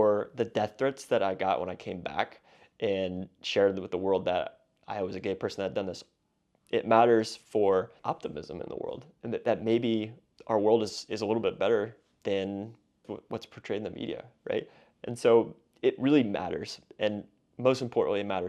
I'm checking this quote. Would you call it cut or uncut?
cut